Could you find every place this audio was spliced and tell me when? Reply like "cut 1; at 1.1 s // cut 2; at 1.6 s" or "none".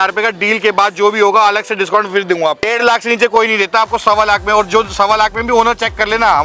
cut 1; at 2.6 s